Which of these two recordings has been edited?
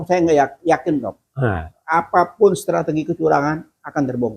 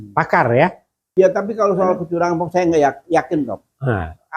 second; 1 cut; at 1.1 s

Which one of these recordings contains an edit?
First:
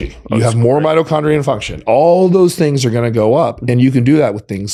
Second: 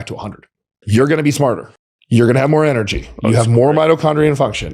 second; 2 cuts; at 0.8 s, 1.9 s

